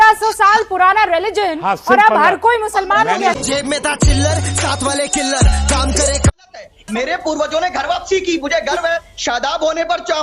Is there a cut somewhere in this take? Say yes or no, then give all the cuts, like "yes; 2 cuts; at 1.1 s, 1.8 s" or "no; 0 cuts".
yes; 1 cut; at 6.3 s